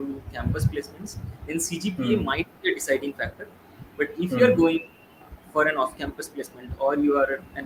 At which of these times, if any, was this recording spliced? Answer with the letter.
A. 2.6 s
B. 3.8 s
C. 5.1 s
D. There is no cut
D